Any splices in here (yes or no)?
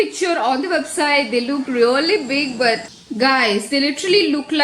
yes